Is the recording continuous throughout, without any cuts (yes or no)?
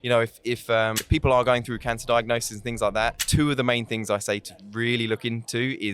no